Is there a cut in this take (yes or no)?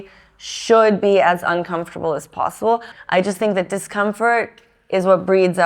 yes